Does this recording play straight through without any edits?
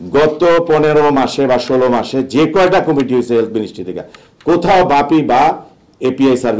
yes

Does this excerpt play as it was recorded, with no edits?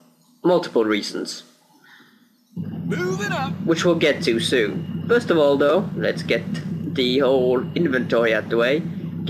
yes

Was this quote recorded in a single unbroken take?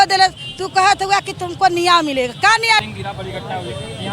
no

